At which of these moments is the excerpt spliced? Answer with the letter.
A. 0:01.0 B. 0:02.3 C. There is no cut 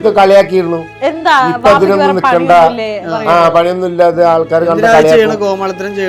C